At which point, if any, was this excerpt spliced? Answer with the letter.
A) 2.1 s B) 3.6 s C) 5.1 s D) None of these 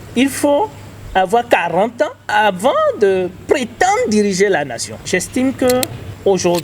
C